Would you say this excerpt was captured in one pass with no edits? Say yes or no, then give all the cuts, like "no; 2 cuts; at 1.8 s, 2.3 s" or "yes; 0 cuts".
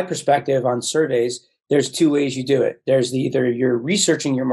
yes; 0 cuts